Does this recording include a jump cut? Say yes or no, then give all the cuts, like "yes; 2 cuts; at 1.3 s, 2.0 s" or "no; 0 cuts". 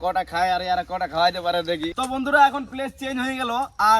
yes; 1 cut; at 1.9 s